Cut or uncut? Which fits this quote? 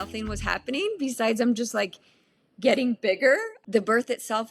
cut